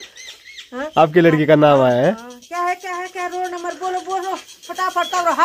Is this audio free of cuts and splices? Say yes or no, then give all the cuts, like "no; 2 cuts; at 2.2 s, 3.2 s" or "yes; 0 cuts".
yes; 0 cuts